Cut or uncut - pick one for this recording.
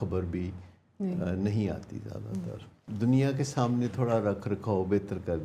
cut